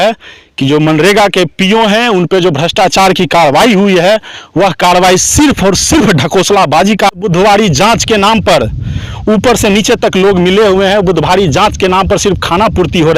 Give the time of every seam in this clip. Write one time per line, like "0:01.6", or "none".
0:07.1